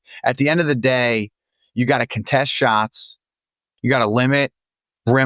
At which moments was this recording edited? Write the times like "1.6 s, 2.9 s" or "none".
3.7 s